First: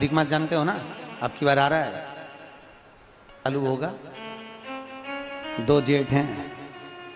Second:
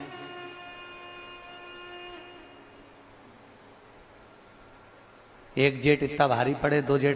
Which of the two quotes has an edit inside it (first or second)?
first